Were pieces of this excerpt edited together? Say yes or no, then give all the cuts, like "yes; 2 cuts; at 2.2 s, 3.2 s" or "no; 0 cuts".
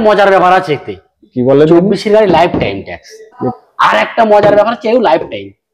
yes; 1 cut; at 3.4 s